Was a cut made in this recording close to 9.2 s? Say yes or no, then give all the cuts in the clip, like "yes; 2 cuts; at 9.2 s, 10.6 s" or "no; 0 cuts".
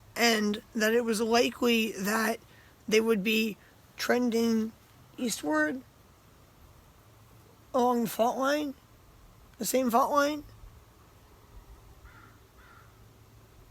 no; 1 cut; at 12.4 s